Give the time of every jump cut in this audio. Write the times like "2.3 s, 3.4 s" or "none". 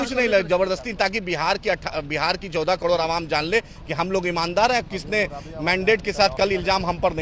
none